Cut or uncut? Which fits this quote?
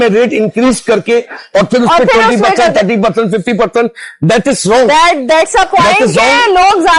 uncut